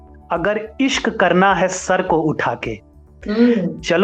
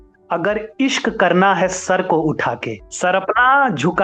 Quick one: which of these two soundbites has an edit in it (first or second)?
second